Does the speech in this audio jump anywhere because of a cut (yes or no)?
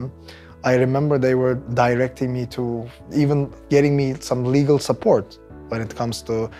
yes